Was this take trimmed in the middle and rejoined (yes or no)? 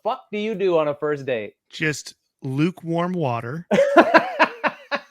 yes